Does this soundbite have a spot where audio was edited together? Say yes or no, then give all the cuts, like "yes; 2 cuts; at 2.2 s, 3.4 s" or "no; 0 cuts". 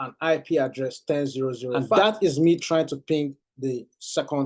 yes; 1 cut; at 2.0 s